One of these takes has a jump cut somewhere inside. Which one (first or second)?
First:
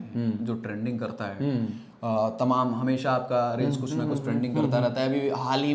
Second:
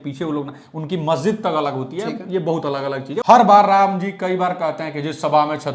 second